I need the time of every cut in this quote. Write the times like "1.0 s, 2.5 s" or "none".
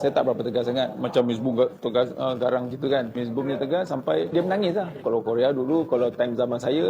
3.1 s, 5.0 s